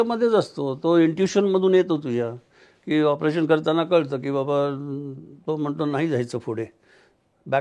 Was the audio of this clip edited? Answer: no; 0 cuts

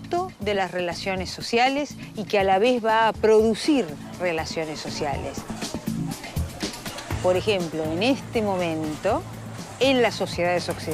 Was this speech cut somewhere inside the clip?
no; 0 cuts

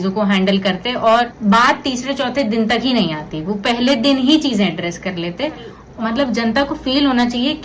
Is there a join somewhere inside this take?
yes; 2 cuts; at 1.3 s, 5.8 s

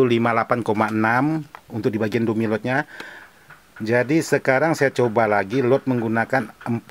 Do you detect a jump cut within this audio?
no; 0 cuts

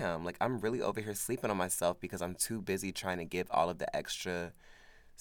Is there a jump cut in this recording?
no; 0 cuts

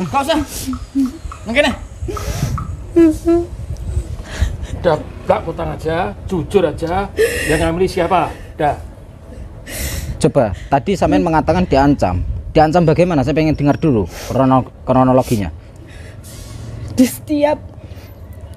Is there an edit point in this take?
no; 0 cuts

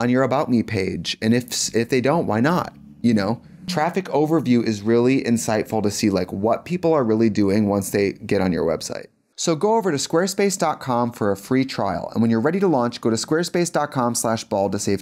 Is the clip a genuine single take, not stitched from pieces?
no; 1 cut; at 9.1 s

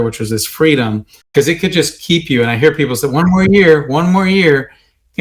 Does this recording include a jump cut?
yes; 1 cut; at 1.3 s

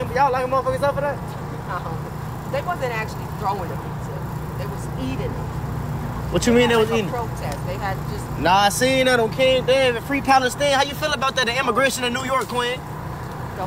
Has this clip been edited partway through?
no; 0 cuts

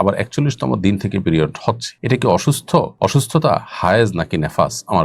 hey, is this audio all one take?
no; 2 cuts; at 1.9 s, 2.9 s

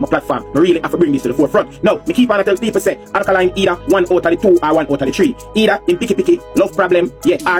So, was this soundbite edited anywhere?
no; 0 cuts

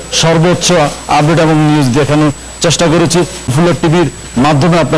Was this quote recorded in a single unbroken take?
no; 1 cut; at 3.7 s

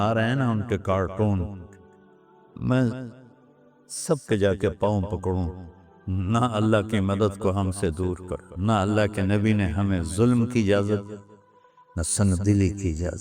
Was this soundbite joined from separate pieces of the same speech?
yes; 1 cut; at 8.4 s

